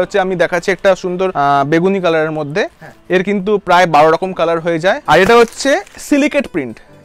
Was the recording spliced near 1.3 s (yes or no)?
yes